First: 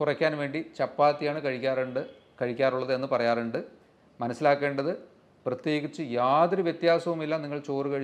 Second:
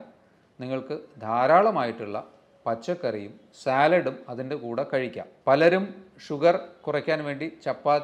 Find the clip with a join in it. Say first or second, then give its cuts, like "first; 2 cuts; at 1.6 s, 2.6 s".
second; 1 cut; at 5.3 s